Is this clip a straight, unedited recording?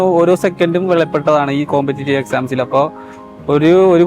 yes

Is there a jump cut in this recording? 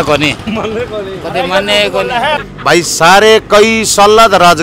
yes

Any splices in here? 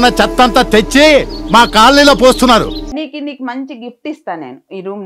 yes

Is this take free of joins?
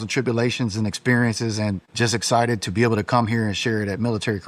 no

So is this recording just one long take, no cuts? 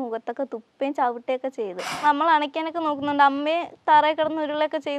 no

